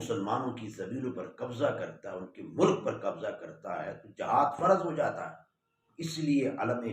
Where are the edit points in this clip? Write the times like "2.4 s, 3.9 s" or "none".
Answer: 5.9 s